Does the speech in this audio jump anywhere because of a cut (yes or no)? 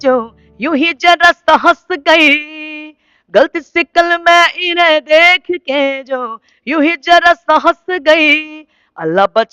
no